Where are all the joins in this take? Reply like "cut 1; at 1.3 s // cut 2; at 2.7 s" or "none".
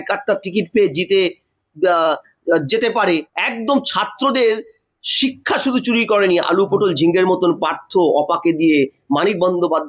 cut 1; at 3.4 s